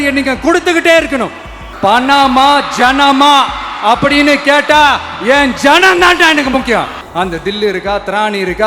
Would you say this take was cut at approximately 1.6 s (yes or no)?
yes